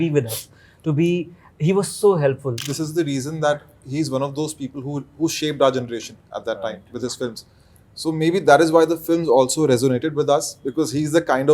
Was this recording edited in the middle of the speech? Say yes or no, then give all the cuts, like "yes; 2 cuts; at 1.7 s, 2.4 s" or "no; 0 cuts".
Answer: yes; 1 cut; at 2.6 s